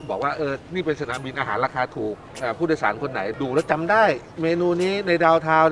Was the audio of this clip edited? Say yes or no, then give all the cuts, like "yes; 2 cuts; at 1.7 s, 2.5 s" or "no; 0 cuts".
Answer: yes; 2 cuts; at 2.3 s, 3.3 s